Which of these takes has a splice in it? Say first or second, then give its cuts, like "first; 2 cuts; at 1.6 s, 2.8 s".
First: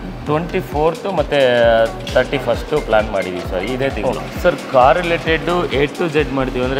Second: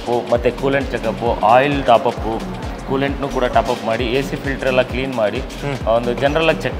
first; 1 cut; at 4.2 s